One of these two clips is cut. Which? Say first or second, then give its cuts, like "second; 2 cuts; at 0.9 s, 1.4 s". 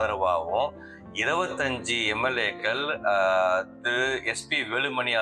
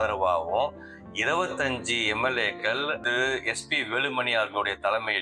second; 1 cut; at 2.9 s